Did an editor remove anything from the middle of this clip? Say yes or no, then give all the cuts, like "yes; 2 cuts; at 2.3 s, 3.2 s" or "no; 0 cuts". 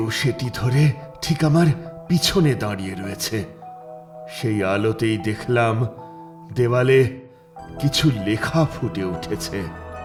no; 0 cuts